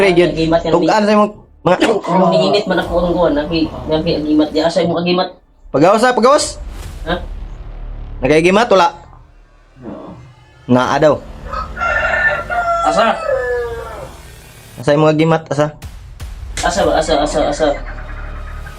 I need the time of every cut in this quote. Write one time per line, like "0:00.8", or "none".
0:01.8